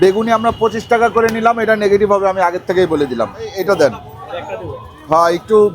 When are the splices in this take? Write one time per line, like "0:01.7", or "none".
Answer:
0:03.5